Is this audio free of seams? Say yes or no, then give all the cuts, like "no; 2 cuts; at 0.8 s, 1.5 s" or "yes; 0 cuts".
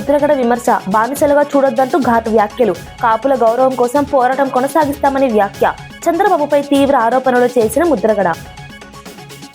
yes; 0 cuts